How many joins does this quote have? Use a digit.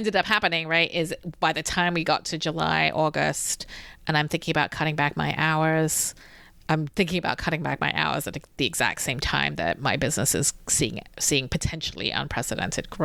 0